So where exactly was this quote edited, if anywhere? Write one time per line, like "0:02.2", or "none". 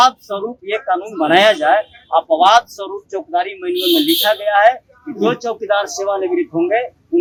none

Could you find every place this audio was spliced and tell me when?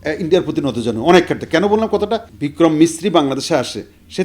0:02.3

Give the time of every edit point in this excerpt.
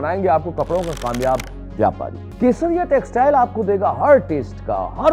0:02.2

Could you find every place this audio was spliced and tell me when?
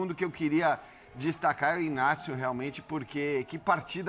none

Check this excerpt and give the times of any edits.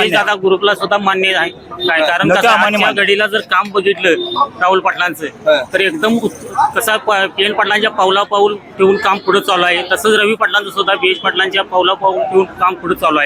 none

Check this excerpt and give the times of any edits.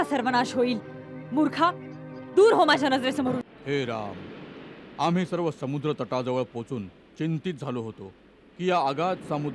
0:03.5

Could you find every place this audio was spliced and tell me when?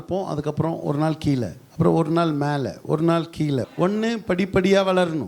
0:03.7

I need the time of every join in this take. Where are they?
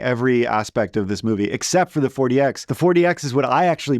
0:02.7

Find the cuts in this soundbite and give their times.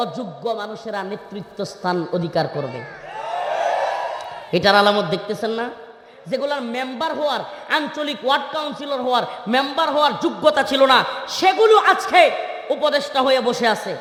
none

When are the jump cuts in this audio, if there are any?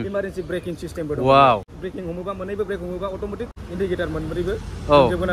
0:01.7
0:03.6

